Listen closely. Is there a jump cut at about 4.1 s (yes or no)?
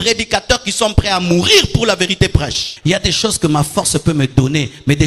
no